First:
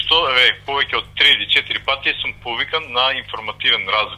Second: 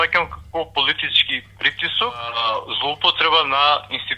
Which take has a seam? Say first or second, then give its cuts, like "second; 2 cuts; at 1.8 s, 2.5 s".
second; 1 cut; at 2.4 s